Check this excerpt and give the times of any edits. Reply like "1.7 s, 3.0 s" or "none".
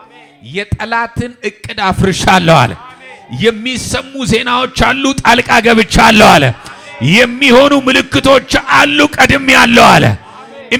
none